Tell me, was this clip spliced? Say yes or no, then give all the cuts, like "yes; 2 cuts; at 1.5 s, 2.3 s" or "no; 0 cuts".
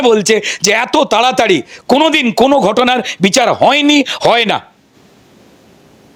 no; 0 cuts